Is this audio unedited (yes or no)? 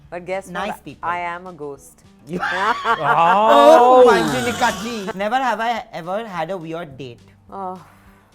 no